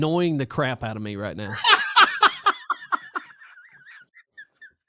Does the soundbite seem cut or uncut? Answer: uncut